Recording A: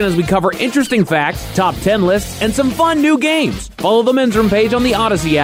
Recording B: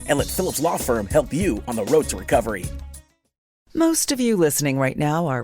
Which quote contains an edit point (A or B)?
B